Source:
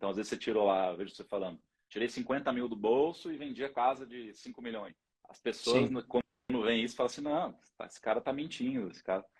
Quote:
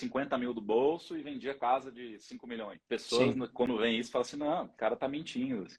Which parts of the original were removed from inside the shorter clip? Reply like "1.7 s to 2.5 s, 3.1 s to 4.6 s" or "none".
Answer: 4.9 s to 5.3 s, 6.2 s to 6.5 s, 7.6 s to 8.0 s